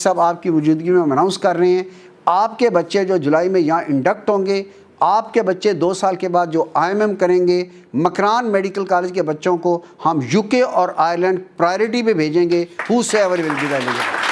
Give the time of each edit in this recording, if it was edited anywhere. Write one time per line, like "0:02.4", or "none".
none